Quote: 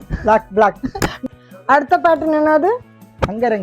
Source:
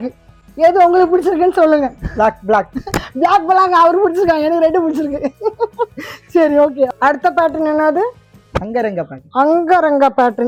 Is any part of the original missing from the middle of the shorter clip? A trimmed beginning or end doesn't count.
yes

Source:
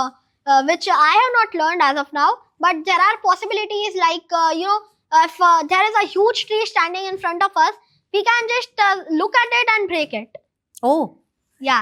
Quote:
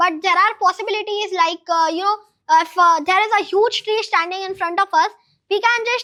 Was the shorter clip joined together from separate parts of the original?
no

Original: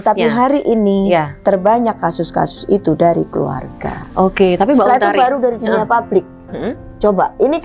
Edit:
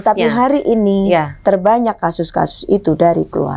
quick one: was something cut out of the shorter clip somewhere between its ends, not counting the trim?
no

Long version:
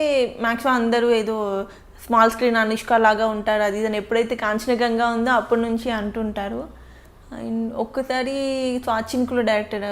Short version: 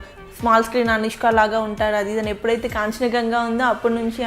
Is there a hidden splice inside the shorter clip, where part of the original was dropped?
no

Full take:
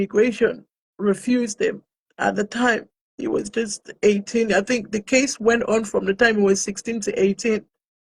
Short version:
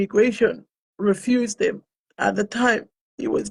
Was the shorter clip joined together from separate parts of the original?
no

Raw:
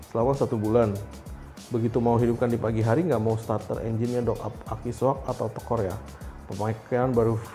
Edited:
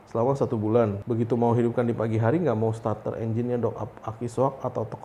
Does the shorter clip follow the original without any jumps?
no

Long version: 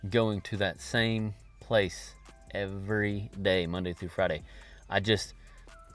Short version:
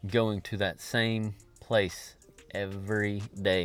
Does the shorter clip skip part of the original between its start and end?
no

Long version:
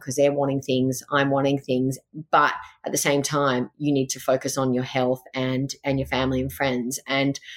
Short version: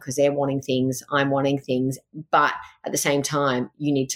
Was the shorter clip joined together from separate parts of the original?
no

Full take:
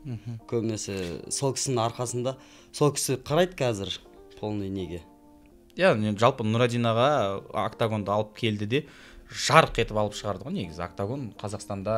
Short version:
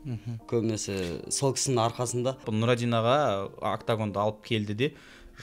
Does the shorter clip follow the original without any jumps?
no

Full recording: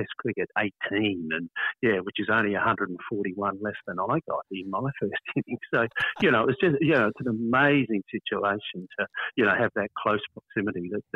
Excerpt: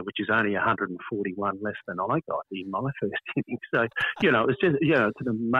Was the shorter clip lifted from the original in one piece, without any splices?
yes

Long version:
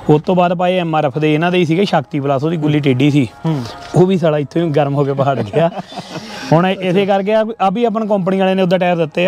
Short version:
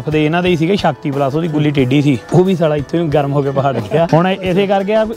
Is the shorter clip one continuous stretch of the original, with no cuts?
no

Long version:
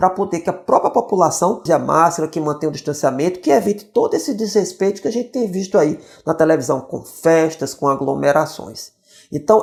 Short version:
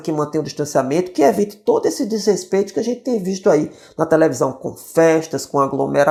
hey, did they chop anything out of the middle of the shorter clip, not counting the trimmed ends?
no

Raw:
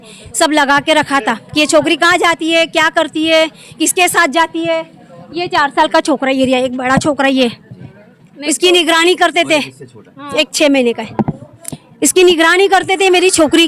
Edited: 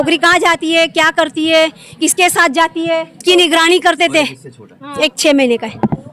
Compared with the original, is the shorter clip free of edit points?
no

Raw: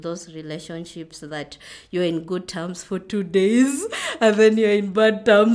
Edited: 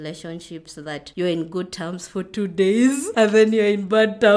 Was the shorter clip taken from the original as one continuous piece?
no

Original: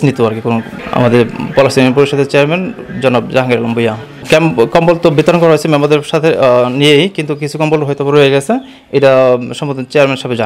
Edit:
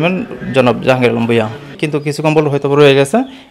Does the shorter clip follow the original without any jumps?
no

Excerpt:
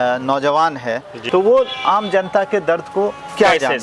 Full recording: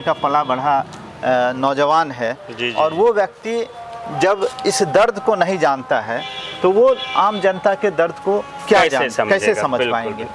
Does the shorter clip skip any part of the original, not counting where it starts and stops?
yes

